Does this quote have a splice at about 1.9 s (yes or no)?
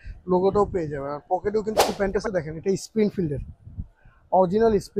yes